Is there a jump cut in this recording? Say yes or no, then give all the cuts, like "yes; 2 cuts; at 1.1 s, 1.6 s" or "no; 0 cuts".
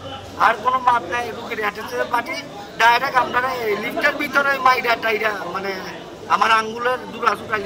no; 0 cuts